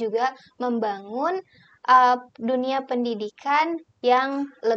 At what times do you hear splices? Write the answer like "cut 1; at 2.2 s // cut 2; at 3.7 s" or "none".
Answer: none